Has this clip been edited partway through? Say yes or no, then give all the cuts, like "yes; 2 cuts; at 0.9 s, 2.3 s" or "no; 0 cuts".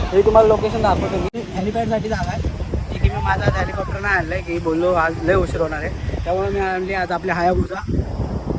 yes; 1 cut; at 1.5 s